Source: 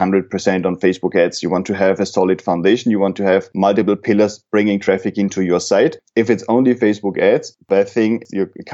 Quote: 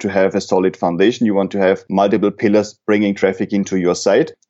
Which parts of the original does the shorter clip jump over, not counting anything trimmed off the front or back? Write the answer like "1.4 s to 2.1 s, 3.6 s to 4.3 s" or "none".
none